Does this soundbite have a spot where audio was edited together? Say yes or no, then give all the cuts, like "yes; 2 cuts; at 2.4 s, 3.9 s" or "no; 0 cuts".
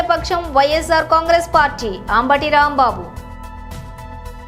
no; 0 cuts